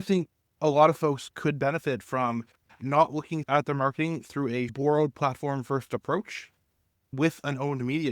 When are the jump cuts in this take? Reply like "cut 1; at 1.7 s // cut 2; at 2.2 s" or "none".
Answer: cut 1; at 3.5 s // cut 2; at 4.7 s // cut 3; at 7.1 s

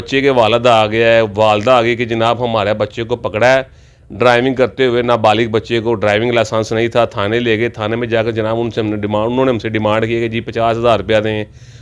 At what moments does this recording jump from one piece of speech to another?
none

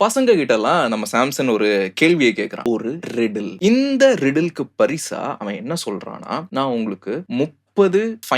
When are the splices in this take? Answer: cut 1; at 3.5 s

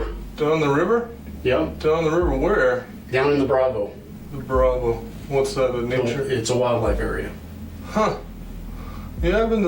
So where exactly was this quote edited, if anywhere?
cut 1; at 1.2 s

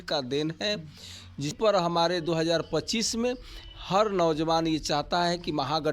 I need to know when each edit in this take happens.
cut 1; at 1.6 s

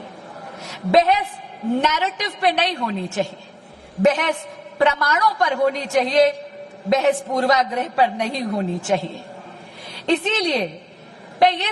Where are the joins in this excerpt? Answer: none

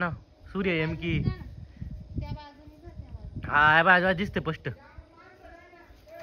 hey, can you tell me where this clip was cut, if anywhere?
none

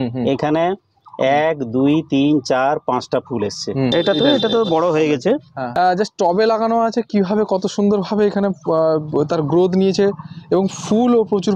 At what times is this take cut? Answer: cut 1; at 3.9 s // cut 2; at 5.6 s

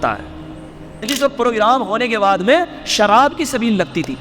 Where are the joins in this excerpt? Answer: cut 1; at 1.0 s

